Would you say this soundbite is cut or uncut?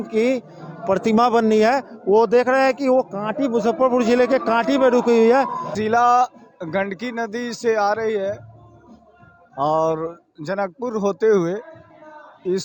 cut